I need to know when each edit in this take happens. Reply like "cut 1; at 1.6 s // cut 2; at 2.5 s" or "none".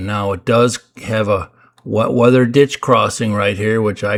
none